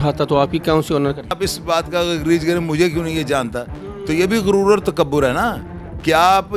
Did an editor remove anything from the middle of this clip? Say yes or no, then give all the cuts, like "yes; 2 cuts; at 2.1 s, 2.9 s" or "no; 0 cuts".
yes; 1 cut; at 1.3 s